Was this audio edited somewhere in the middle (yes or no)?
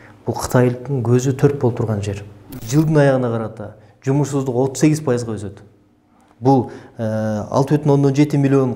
yes